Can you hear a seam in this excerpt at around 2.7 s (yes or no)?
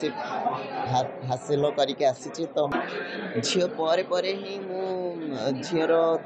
yes